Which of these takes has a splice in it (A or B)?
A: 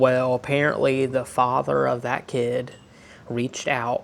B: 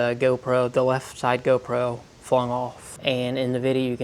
B